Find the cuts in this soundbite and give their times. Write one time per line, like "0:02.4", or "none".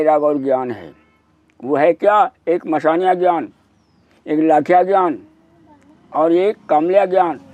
none